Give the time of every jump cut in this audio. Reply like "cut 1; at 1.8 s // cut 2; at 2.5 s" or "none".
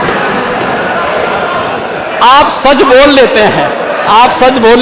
cut 1; at 2.0 s